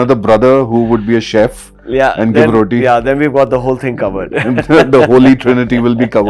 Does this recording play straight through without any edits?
yes; 0 cuts

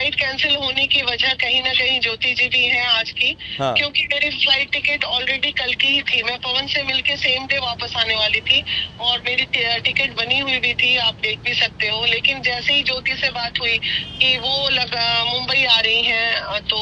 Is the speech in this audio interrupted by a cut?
no; 0 cuts

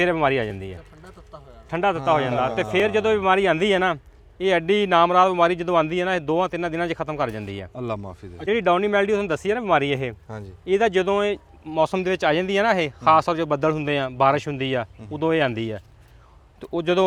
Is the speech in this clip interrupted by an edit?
no; 0 cuts

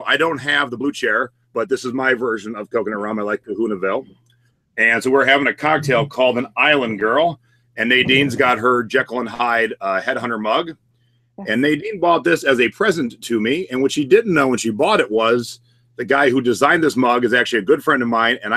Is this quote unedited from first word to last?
yes; 0 cuts

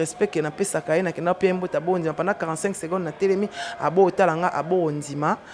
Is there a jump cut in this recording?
no; 0 cuts

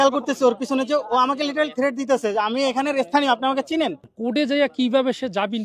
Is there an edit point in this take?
yes; 1 cut; at 4.0 s

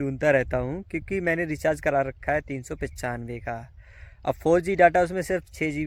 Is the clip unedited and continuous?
yes; 0 cuts

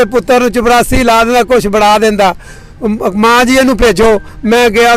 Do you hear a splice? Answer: no; 0 cuts

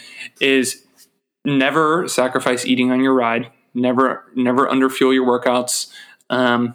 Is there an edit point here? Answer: no; 0 cuts

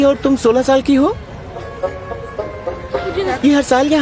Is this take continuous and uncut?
yes; 0 cuts

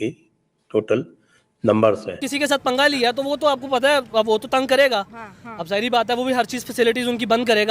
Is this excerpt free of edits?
no; 1 cut; at 2.1 s

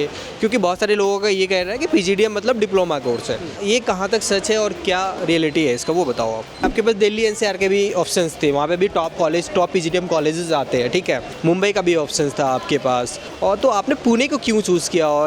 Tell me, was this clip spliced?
yes; 3 cuts; at 6.6 s, 11.3 s, 13.3 s

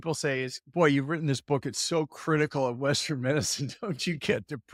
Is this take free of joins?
yes; 0 cuts

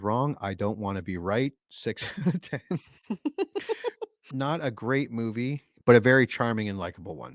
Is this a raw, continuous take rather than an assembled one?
no; 1 cut; at 4.1 s

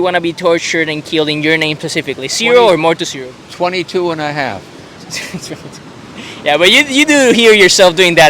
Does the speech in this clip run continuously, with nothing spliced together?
yes; 0 cuts

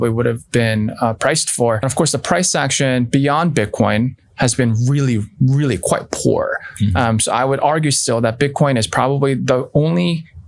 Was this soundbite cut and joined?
yes; 1 cut; at 1.9 s

